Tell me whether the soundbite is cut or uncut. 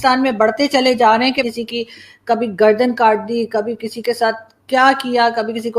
cut